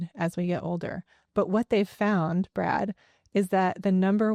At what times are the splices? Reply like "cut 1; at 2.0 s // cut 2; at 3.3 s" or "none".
none